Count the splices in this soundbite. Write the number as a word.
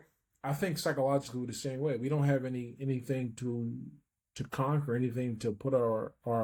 zero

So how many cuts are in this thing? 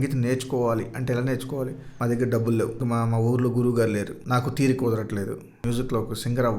four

